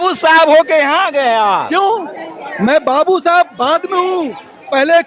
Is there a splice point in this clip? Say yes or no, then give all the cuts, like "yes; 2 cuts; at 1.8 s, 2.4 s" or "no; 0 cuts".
no; 0 cuts